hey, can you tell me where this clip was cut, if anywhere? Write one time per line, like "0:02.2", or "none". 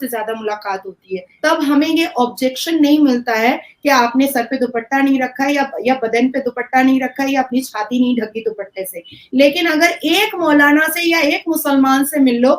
0:01.2